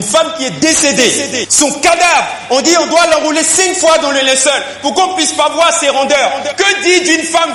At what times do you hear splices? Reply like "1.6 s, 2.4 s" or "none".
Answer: none